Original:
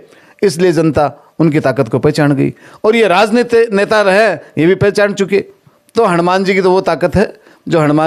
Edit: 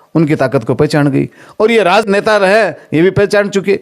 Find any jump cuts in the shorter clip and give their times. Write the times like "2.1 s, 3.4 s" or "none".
2.0 s